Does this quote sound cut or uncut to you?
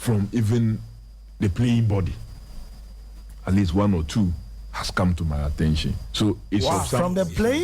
uncut